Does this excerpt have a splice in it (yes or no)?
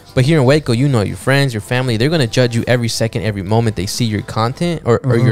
no